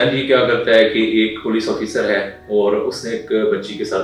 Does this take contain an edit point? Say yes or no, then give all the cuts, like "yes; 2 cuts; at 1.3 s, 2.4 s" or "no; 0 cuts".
no; 0 cuts